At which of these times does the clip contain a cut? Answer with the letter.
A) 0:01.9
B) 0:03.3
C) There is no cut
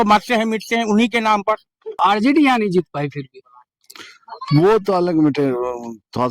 A